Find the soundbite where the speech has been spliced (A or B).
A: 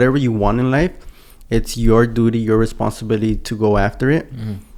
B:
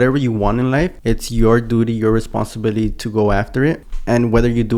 B